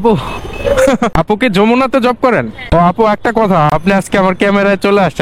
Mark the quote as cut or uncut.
cut